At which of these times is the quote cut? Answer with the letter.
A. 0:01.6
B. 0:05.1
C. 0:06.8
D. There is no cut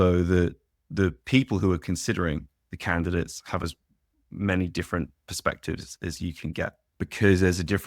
C